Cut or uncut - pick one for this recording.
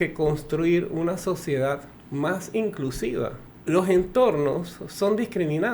cut